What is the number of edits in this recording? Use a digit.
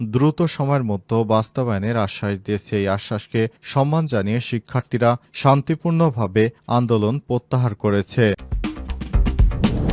1